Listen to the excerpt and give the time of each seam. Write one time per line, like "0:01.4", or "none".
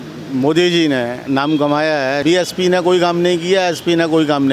0:02.2